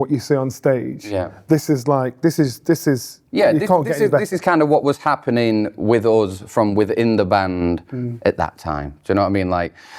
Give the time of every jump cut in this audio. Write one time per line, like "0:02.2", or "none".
none